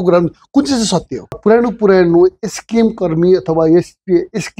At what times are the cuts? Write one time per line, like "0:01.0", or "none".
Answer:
0:01.4